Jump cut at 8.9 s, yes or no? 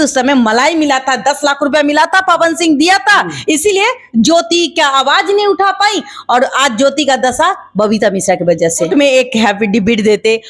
yes